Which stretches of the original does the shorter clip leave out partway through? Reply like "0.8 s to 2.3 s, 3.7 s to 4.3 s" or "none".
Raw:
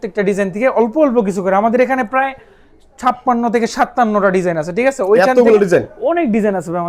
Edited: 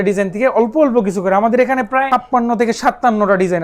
2.3 s to 3.0 s